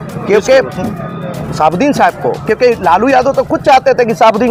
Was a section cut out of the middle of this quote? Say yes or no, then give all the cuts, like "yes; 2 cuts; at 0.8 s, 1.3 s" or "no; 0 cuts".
no; 0 cuts